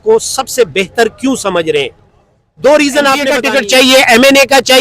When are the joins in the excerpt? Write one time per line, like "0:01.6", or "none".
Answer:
0:03.4